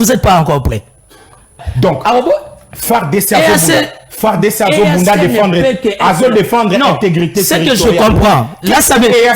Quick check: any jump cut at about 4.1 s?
no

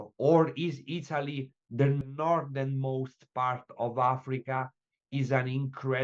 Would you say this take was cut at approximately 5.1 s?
no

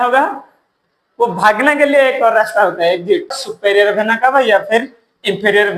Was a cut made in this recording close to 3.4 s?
yes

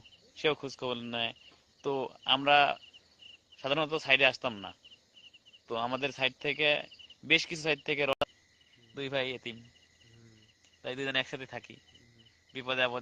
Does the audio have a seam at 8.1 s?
yes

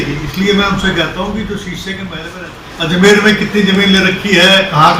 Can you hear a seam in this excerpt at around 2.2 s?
yes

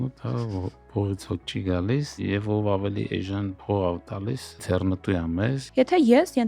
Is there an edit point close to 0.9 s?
no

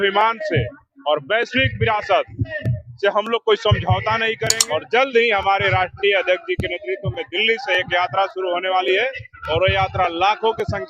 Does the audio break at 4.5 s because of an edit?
yes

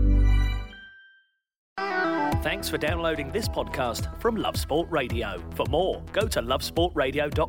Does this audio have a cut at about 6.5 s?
no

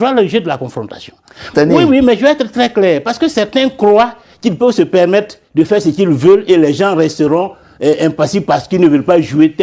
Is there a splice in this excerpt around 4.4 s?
no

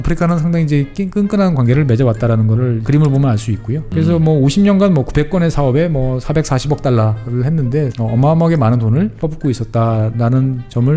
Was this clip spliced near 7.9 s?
yes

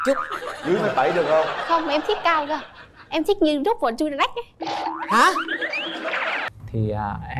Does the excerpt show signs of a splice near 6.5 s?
yes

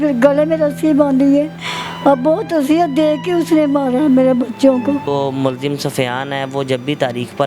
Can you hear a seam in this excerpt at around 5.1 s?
yes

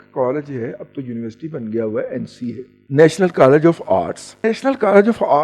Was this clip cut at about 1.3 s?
no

